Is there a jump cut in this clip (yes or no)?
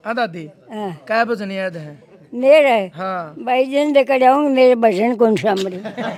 no